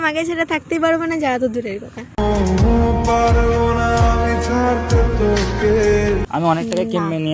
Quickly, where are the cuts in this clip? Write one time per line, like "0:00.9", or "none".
0:06.2